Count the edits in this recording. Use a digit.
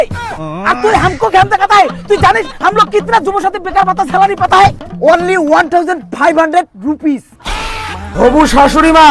1